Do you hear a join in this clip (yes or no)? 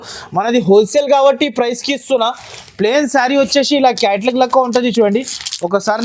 no